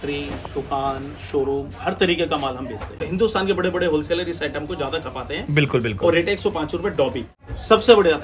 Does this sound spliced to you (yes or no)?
yes